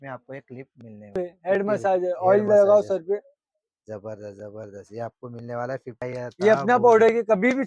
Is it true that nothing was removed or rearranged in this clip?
no; 2 cuts; at 1.2 s, 5.9 s

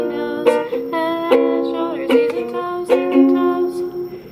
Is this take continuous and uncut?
yes; 0 cuts

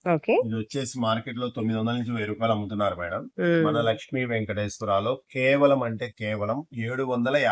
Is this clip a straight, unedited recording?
yes; 0 cuts

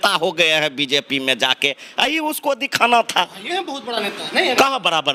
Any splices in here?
no; 0 cuts

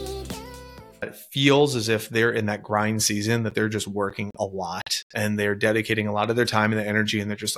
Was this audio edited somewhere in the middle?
yes; 1 cut; at 1.2 s

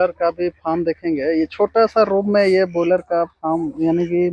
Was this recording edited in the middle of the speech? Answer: no; 0 cuts

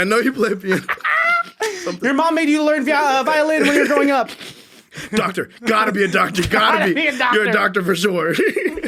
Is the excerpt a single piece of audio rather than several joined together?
yes; 0 cuts

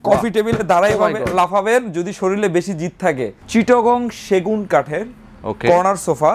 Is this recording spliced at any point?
yes; 1 cut; at 3.3 s

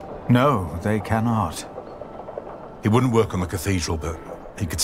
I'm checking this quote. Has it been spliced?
no; 0 cuts

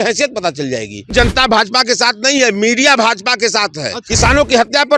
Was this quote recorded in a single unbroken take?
no; 2 cuts; at 1.1 s, 4.0 s

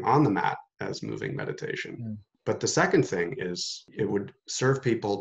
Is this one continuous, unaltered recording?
no; 2 cuts; at 2.3 s, 3.8 s

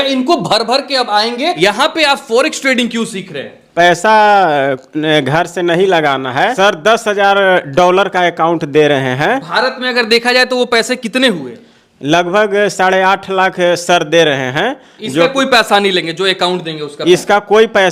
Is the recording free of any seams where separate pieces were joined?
no; 2 cuts; at 1.6 s, 6.5 s

